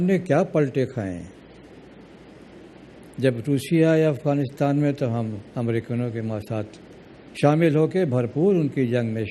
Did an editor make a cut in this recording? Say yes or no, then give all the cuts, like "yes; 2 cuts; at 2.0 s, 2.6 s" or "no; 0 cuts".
yes; 1 cut; at 7.6 s